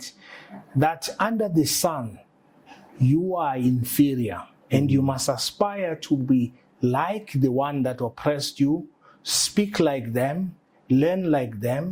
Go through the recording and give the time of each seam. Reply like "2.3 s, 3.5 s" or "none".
none